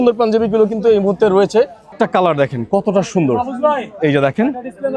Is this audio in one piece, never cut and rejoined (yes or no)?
no